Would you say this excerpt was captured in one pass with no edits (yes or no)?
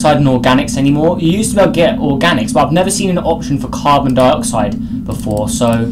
yes